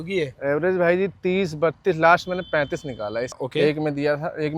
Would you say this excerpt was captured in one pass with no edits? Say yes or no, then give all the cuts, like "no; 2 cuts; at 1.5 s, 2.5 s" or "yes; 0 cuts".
no; 1 cut; at 3.3 s